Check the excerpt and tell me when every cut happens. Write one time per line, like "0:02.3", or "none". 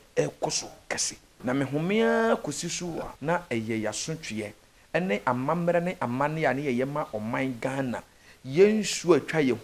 0:01.2
0:03.1